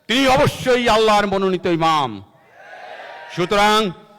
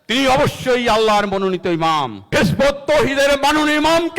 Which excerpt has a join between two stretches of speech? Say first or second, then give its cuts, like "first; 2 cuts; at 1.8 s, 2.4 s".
second; 1 cut; at 2.2 s